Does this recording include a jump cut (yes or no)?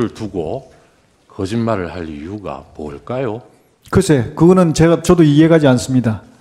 no